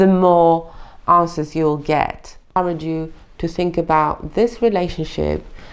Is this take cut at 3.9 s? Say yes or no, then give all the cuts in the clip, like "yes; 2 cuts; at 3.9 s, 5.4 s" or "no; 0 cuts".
no; 1 cut; at 2.6 s